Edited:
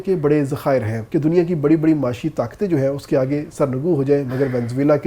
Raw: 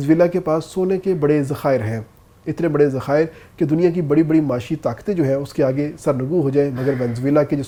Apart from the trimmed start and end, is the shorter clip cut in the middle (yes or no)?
yes